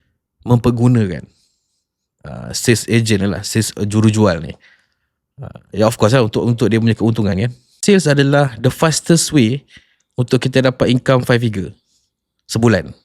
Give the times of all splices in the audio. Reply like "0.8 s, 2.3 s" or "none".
7.7 s